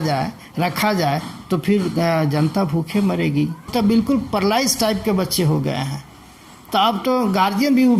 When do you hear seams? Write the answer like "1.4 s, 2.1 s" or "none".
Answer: 3.7 s